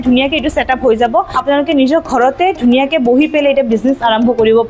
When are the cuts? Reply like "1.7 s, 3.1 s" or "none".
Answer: 1.3 s

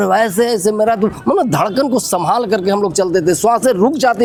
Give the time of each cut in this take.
none

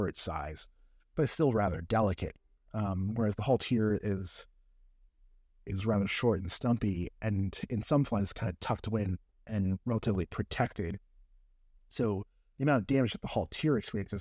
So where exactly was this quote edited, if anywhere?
none

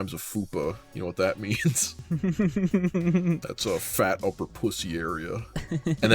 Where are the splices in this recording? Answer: 1.9 s, 3.5 s

